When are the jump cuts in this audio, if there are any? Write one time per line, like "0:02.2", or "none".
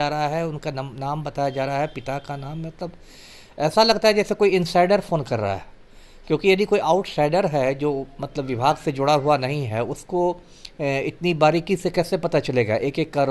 none